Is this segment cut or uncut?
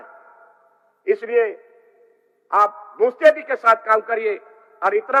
uncut